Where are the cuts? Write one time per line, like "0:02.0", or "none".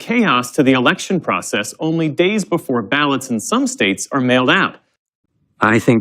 0:05.0